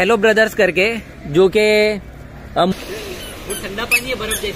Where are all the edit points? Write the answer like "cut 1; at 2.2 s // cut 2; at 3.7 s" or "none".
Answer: cut 1; at 2.7 s